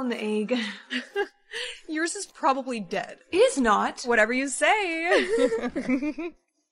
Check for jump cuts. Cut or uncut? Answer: cut